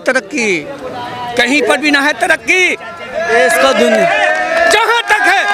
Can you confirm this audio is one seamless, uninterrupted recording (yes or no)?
yes